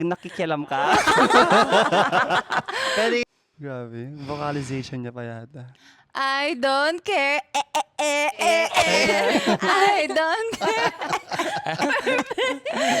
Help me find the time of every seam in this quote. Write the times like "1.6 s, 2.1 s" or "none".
3.2 s